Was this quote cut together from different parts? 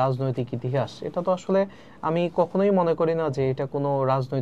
no; 0 cuts

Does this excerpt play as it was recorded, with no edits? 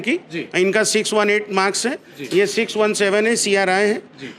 yes; 0 cuts

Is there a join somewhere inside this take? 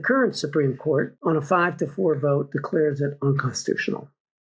yes; 1 cut; at 1.1 s

